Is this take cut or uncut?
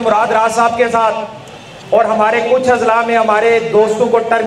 uncut